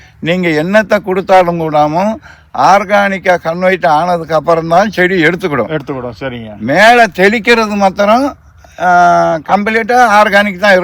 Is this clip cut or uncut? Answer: uncut